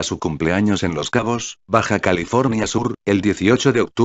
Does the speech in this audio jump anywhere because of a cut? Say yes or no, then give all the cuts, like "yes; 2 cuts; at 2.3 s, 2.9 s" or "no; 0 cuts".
yes; 1 cut; at 1.0 s